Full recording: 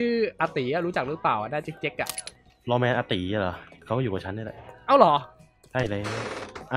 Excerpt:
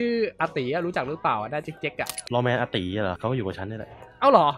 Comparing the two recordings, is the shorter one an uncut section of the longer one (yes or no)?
no